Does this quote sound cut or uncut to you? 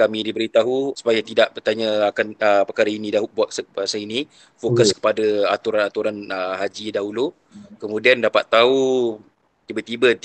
cut